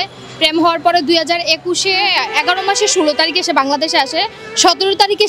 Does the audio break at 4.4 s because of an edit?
no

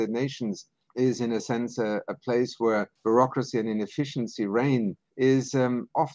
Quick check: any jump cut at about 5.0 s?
yes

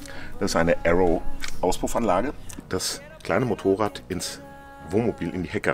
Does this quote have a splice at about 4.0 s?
no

